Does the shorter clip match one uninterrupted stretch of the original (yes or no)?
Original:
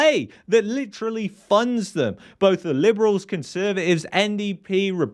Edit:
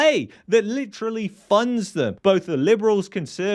no